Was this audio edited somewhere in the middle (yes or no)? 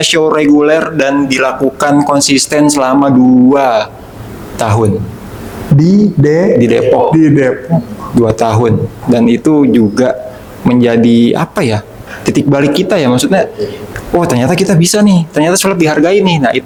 no